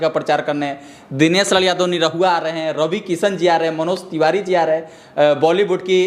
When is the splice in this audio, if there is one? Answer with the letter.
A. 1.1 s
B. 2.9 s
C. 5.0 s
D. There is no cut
D